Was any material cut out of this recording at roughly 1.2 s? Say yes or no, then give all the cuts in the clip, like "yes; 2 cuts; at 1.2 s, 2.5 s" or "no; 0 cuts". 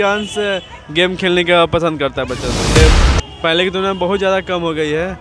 no; 1 cut; at 2.8 s